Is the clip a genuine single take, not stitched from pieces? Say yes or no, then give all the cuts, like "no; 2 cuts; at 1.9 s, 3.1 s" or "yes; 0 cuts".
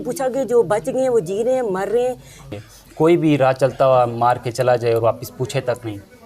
no; 1 cut; at 2.4 s